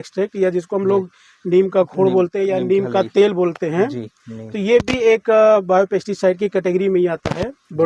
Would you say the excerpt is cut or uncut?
uncut